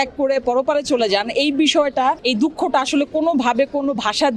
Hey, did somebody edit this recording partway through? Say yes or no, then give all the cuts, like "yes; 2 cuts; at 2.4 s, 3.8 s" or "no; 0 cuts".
yes; 1 cut; at 2.2 s